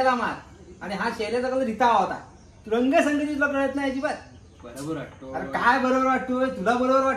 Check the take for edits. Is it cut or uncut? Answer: uncut